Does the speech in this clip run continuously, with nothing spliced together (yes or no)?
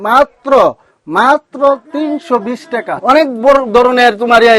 no